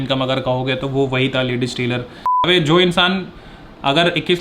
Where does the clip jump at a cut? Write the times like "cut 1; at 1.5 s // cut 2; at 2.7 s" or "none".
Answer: cut 1; at 2.1 s